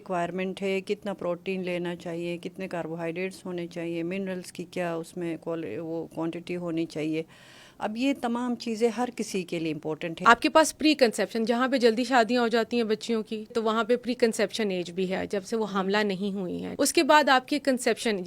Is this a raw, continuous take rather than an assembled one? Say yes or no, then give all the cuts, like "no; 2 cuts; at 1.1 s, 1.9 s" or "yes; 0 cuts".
no; 3 cuts; at 10.0 s, 13.5 s, 16.7 s